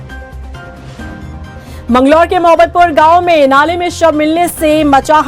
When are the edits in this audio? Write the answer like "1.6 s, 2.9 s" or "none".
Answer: 1.5 s